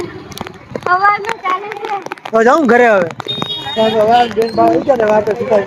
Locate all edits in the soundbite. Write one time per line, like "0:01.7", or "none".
none